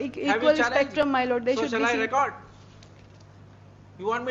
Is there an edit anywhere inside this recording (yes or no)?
no